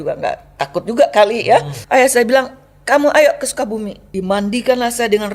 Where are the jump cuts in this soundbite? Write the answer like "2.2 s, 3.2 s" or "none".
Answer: 1.8 s, 4.0 s